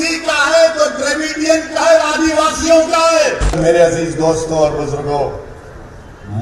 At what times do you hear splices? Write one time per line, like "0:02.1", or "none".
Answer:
0:03.5